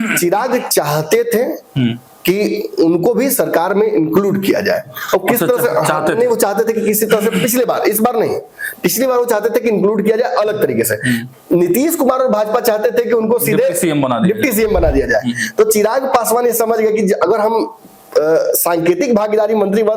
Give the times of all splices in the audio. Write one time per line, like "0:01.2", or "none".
none